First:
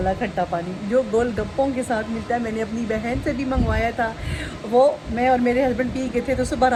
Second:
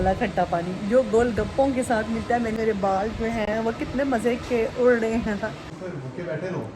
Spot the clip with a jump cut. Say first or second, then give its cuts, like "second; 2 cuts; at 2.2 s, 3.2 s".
second; 2 cuts; at 2.5 s, 5.6 s